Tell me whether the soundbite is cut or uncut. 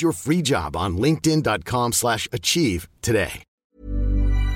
cut